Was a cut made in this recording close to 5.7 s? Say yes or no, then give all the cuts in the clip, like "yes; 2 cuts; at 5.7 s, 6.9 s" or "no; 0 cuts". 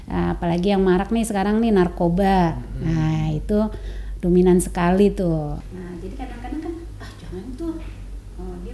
yes; 1 cut; at 5.7 s